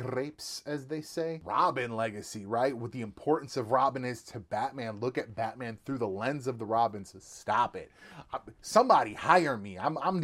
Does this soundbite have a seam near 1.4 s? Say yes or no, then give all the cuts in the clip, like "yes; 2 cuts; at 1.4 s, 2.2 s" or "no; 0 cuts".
yes; 1 cut; at 1.4 s